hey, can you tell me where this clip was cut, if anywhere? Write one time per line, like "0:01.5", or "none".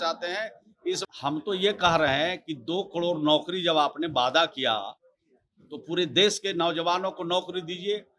0:01.0